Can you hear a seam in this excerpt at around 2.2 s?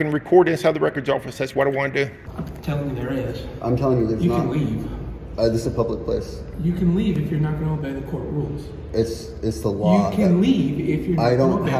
yes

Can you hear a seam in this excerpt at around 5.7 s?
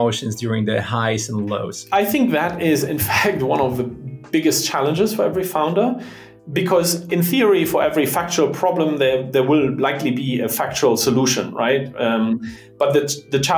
no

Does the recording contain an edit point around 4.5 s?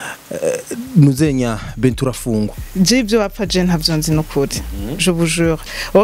no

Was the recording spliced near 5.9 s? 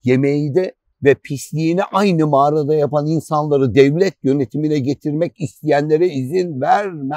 no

